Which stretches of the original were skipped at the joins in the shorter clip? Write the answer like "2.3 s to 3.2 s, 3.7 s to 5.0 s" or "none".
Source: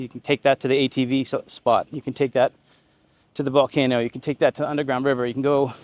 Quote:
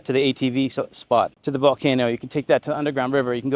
1.9 s to 3.3 s